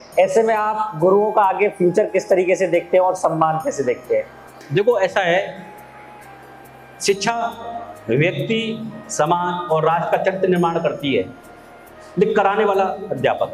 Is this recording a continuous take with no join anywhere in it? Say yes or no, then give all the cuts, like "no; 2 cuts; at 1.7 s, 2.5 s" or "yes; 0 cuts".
yes; 0 cuts